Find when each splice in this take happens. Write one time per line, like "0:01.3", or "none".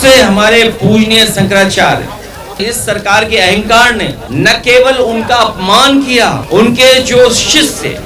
0:02.6
0:04.2
0:06.4